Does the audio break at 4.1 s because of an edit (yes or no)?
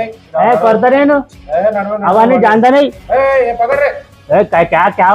yes